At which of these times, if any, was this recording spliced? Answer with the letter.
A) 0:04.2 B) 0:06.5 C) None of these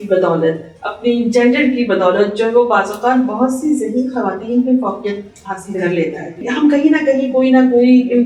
B